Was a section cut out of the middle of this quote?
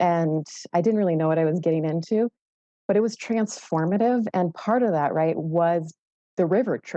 no; 0 cuts

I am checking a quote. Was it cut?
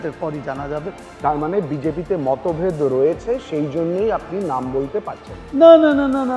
yes; 1 cut; at 1.0 s

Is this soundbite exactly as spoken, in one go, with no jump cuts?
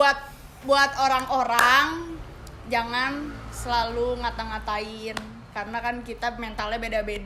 yes; 0 cuts

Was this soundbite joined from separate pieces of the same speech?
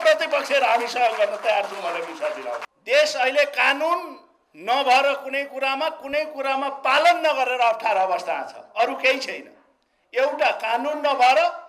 yes; 1 cut; at 2.7 s

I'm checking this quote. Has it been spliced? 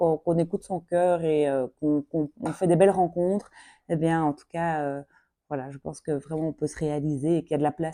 no; 0 cuts

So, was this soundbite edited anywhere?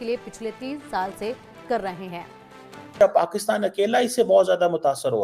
yes; 1 cut; at 3.0 s

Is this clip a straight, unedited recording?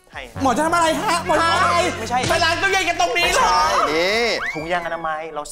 yes; 0 cuts

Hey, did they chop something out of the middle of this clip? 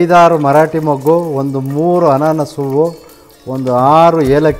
no; 0 cuts

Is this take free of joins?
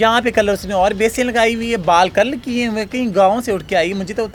yes; 0 cuts

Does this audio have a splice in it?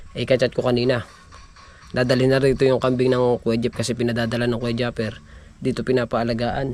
no; 0 cuts

